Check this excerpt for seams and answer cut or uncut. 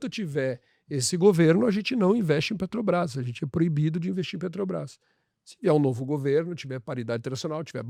uncut